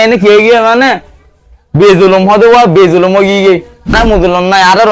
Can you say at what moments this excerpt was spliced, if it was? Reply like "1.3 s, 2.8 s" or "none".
3.9 s